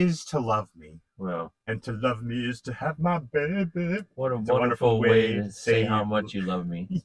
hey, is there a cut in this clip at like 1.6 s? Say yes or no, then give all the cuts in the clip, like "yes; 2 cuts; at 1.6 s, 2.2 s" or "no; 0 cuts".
yes; 2 cuts; at 1.6 s, 4.1 s